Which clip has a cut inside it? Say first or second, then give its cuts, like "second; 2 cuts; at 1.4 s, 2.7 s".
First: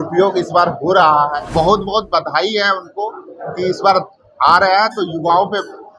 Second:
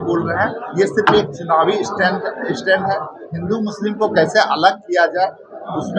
first; 1 cut; at 1.5 s